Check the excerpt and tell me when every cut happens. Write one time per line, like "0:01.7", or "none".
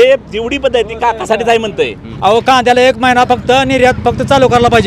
0:02.1